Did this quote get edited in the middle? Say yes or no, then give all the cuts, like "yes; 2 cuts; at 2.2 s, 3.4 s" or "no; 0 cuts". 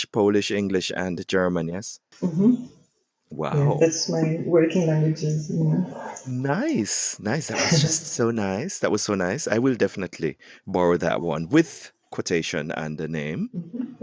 yes; 1 cut; at 12.0 s